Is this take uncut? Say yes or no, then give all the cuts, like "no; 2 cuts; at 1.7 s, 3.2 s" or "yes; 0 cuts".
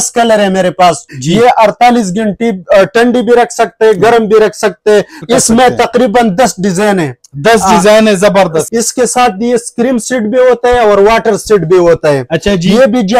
no; 3 cuts; at 1.1 s, 5.2 s, 8.7 s